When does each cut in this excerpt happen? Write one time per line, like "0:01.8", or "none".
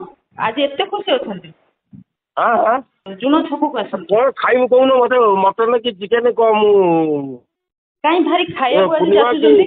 0:03.0